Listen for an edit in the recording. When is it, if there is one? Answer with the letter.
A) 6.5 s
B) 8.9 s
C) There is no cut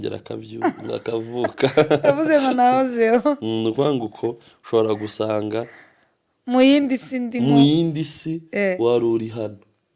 C